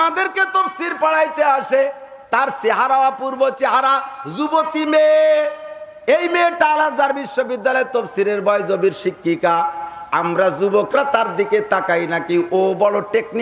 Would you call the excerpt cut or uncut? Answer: uncut